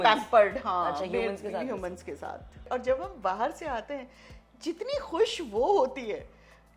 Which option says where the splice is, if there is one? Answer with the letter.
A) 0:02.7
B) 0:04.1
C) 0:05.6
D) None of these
A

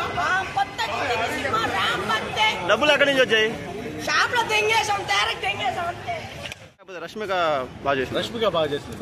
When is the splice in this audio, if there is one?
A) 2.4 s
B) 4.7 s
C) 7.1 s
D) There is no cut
C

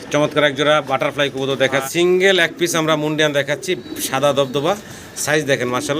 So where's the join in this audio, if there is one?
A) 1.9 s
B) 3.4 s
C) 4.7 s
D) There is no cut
A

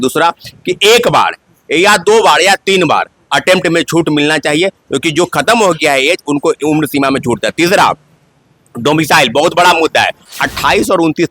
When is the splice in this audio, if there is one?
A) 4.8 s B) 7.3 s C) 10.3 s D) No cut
C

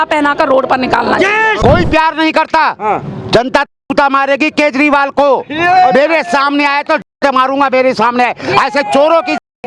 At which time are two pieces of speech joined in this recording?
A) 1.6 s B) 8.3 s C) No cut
A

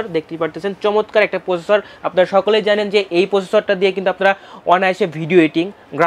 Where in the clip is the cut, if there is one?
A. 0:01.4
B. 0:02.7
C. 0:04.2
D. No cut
D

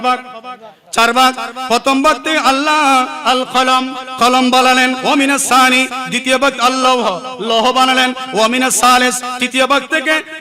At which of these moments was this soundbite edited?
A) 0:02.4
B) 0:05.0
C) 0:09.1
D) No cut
B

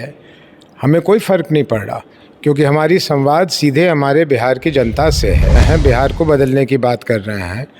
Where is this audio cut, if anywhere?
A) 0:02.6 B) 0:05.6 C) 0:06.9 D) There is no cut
B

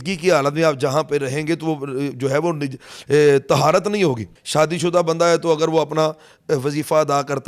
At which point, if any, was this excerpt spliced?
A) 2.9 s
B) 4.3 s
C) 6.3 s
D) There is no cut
B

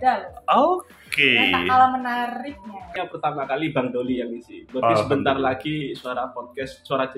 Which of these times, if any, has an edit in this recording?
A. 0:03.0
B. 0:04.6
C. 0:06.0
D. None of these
A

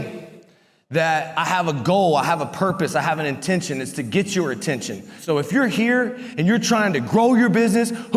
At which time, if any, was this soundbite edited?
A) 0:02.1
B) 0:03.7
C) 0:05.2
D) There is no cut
C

